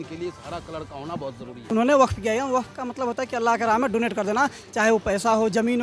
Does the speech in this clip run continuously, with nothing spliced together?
no; 1 cut; at 1.6 s

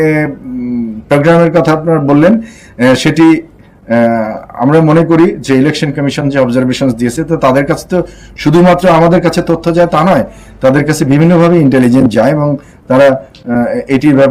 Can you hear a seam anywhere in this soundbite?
no; 0 cuts

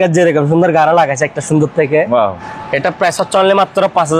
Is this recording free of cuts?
no; 1 cut; at 2.5 s

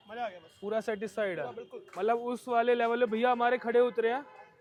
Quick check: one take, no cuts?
yes; 0 cuts

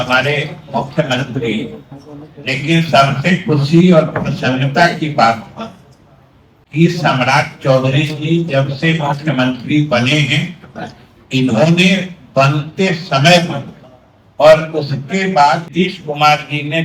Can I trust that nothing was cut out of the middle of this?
no; 1 cut; at 15.7 s

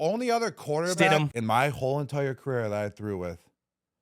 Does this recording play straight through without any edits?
no; 1 cut; at 1.1 s

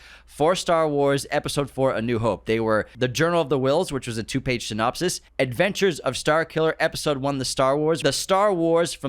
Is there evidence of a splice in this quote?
yes; 3 cuts; at 2.9 s, 5.2 s, 8.0 s

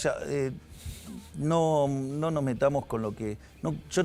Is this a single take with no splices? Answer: yes; 0 cuts

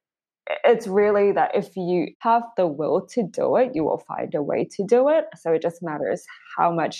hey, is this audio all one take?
no; 1 cut; at 2.1 s

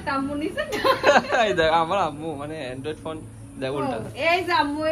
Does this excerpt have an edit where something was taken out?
no; 0 cuts

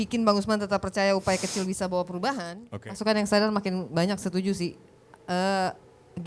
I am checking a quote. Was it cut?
yes; 1 cut; at 2.5 s

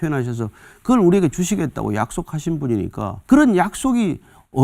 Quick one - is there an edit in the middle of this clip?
yes; 1 cut; at 3.2 s

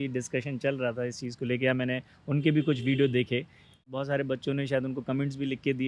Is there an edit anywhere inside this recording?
yes; 1 cut; at 3.9 s

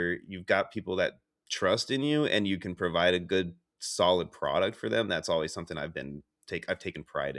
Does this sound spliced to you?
no; 0 cuts

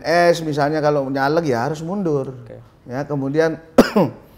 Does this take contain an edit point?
no; 0 cuts

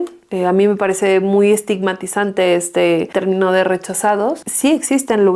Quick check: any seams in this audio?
yes; 2 cuts; at 3.1 s, 4.5 s

